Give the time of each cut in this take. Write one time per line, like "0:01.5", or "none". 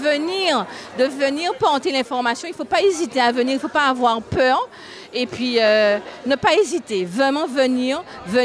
none